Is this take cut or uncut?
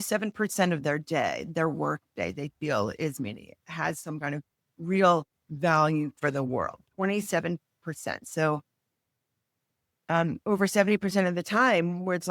uncut